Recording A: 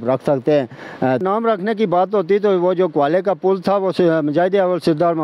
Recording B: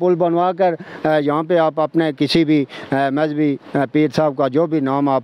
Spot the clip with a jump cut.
A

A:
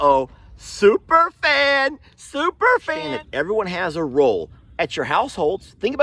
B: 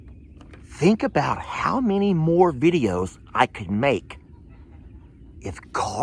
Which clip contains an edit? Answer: A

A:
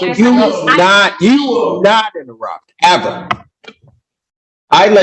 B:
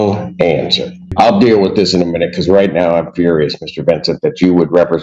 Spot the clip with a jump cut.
B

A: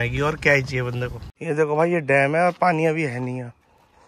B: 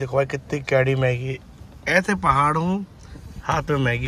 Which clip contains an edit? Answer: A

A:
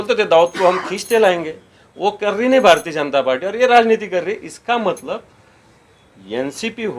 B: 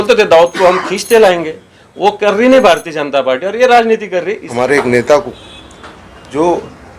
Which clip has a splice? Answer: B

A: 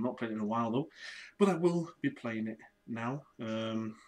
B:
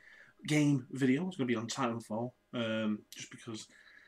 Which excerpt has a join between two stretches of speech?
A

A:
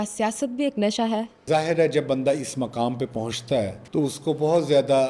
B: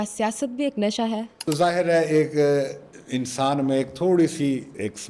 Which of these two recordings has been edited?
B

